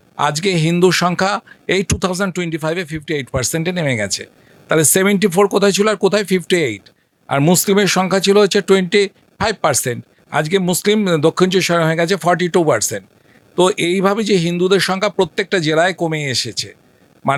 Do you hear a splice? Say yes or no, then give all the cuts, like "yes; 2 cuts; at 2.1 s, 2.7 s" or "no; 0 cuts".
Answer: no; 0 cuts